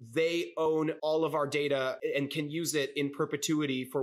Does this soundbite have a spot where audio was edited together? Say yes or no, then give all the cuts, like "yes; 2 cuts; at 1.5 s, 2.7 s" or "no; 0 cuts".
yes; 2 cuts; at 0.8 s, 2.0 s